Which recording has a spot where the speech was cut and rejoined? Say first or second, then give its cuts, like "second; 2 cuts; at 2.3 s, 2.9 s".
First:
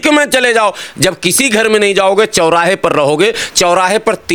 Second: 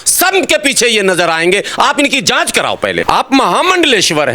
second; 1 cut; at 3.0 s